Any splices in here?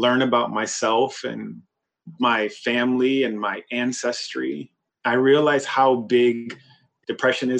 no; 0 cuts

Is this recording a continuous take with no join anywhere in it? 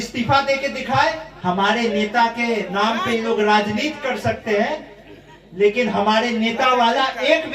no; 1 cut; at 1.3 s

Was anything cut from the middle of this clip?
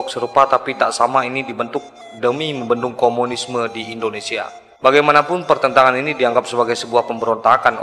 yes; 1 cut; at 4.6 s

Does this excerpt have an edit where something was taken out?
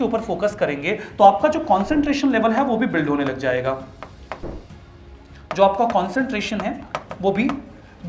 no; 0 cuts

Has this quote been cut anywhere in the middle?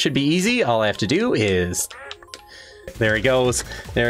yes; 1 cut; at 2.9 s

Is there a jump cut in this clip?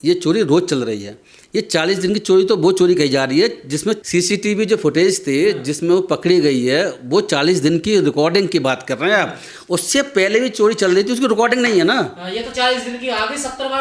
no; 0 cuts

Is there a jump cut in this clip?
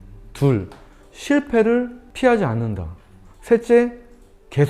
yes; 1 cut; at 2.0 s

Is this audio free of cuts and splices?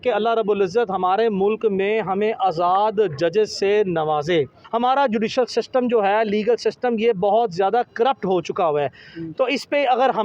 no; 1 cut; at 4.6 s

